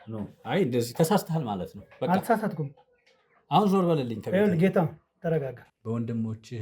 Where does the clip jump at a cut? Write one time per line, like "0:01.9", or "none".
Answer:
0:05.7